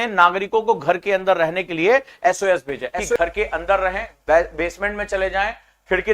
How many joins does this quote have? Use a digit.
1